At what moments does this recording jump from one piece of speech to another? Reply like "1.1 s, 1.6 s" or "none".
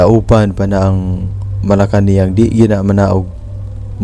none